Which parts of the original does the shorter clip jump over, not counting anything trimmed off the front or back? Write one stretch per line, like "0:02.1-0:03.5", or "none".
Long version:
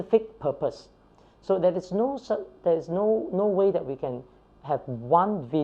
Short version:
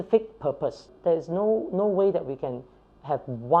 0:00.9-0:02.5